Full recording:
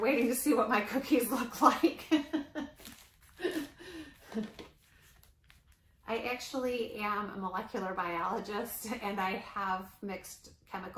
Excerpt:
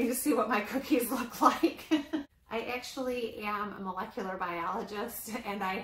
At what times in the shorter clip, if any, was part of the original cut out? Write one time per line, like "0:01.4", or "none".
0:02.3